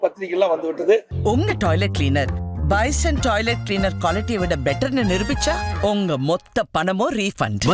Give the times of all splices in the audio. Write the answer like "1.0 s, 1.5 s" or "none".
1.1 s